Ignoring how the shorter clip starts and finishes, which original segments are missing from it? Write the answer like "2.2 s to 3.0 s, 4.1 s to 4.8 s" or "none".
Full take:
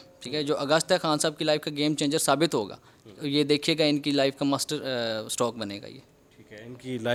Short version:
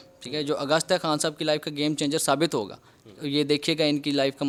none